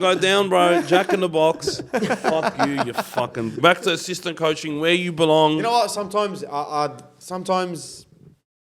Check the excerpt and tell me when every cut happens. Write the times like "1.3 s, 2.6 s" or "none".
none

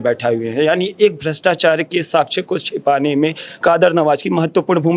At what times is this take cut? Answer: none

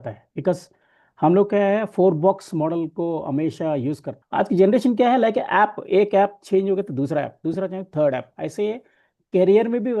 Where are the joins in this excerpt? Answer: 4.1 s

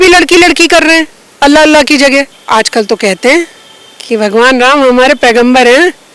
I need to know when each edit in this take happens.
2.3 s

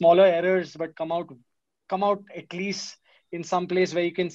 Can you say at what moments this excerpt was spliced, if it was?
none

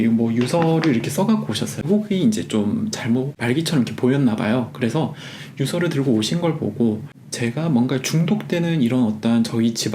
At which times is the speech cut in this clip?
1.8 s

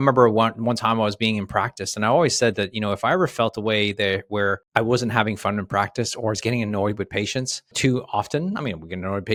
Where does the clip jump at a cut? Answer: none

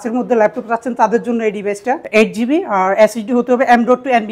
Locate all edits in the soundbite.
2.0 s

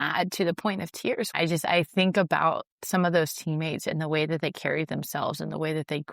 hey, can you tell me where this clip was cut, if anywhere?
1.3 s

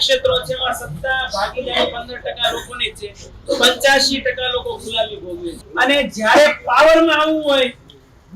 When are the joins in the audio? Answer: 5.6 s

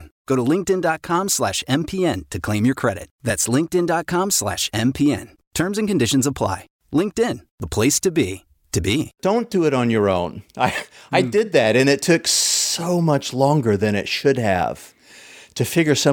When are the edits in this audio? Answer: 9.1 s

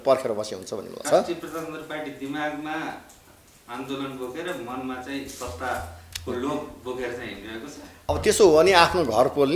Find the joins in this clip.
1.0 s, 7.9 s

